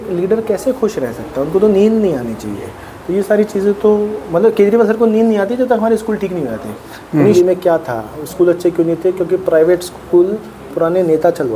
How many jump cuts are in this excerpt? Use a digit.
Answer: 1